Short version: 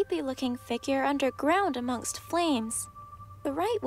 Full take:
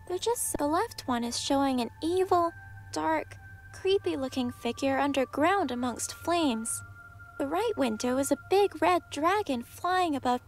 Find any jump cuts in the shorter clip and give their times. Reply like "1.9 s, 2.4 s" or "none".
none